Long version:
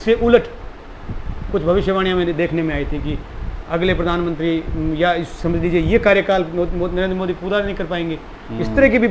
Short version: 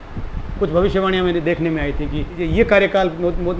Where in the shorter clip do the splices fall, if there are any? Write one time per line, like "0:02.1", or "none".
0:02.4